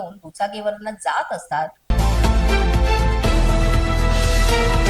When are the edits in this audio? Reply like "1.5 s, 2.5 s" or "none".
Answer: 1.8 s